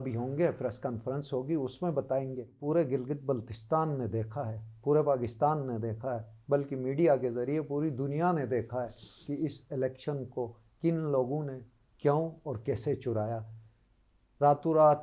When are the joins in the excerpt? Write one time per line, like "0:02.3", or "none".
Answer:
0:02.5